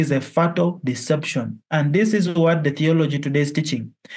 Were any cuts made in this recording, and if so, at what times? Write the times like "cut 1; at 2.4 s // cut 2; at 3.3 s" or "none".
none